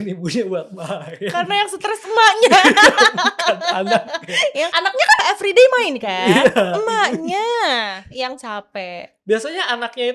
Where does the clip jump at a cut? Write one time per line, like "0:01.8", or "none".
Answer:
0:05.2